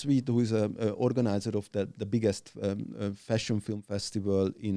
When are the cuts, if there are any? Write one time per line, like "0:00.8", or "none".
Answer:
none